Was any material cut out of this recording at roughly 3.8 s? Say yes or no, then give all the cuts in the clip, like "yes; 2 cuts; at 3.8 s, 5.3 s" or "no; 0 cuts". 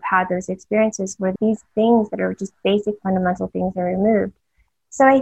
no; 1 cut; at 1.3 s